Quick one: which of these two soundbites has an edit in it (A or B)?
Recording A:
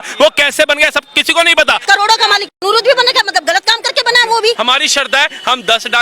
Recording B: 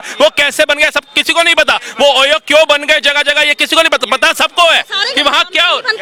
A